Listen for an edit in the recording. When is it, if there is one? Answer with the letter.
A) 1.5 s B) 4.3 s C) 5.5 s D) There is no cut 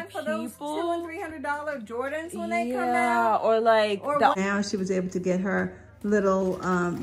B